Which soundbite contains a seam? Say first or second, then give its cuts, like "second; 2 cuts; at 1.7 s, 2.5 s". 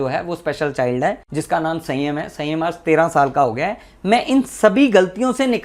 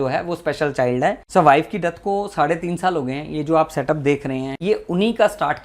second; 2 cuts; at 1.2 s, 4.5 s